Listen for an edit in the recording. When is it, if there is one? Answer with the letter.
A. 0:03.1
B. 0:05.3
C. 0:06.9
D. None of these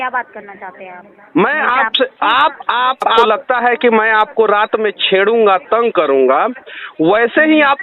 A